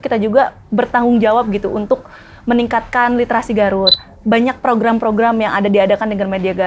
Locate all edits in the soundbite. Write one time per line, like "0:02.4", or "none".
0:04.0